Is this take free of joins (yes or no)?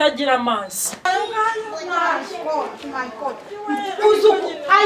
no